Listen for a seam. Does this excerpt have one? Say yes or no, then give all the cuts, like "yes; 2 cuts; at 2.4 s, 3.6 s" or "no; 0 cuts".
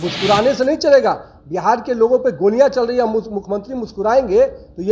no; 0 cuts